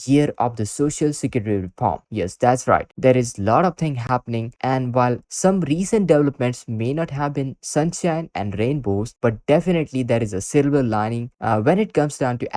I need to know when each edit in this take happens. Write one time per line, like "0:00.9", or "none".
none